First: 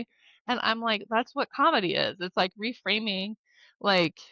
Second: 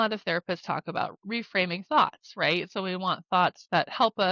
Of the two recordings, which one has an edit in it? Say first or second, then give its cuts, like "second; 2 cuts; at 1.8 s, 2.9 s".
second; 1 cut; at 1.1 s